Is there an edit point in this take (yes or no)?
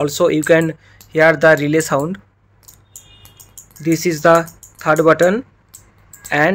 no